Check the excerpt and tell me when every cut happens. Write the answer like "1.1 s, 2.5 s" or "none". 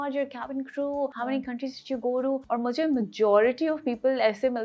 1.1 s, 2.4 s